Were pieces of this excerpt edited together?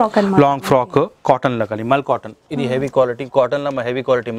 no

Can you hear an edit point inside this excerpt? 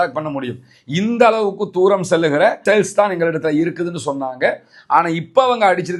no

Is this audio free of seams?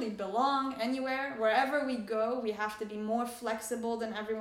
yes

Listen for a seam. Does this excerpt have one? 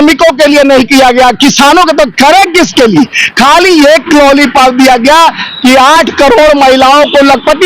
no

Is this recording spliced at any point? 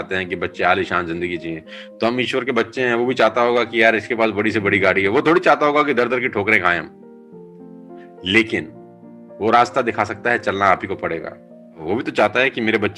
yes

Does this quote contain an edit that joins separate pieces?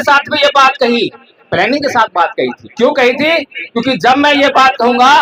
no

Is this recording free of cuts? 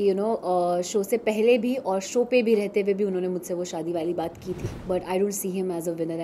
no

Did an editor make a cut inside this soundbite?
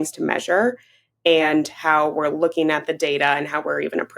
no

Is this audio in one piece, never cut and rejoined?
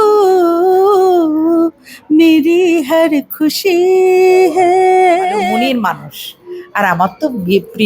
no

